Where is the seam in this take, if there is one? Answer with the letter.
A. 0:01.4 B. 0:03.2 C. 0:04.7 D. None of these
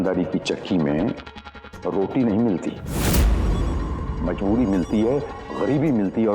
D